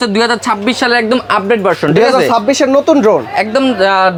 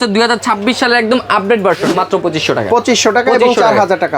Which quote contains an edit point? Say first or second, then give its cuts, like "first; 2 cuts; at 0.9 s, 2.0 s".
second; 1 cut; at 1.9 s